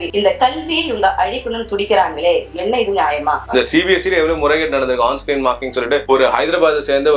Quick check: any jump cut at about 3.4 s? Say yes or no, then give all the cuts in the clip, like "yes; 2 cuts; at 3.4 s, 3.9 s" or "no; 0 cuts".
yes; 1 cut; at 3.4 s